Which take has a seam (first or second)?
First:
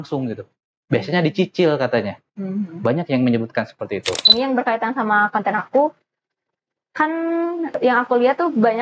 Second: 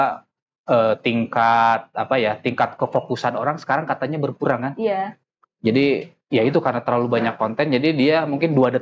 first